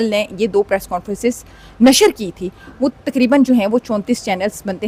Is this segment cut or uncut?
uncut